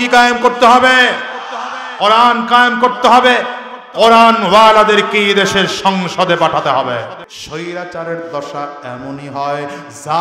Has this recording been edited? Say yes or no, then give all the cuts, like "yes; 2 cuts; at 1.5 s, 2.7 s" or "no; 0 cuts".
yes; 1 cut; at 7.4 s